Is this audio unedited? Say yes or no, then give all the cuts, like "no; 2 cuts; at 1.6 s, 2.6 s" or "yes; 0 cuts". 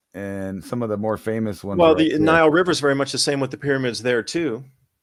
yes; 0 cuts